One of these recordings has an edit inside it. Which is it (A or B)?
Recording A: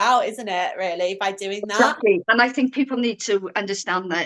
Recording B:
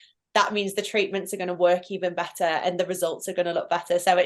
A